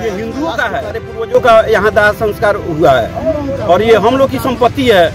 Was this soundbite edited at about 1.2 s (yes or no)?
yes